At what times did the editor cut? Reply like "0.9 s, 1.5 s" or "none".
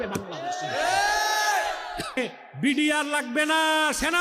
2.2 s